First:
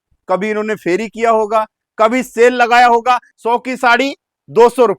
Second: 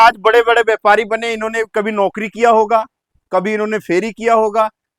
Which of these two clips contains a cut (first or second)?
first